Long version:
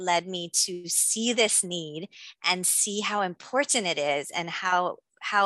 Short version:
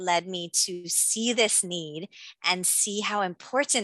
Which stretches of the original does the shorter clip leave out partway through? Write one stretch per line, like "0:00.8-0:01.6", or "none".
none